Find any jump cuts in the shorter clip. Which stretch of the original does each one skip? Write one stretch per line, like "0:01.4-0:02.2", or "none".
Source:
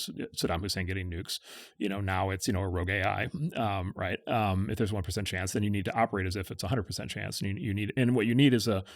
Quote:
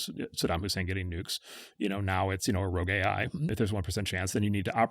0:03.5-0:04.7